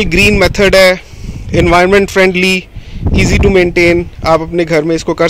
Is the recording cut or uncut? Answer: uncut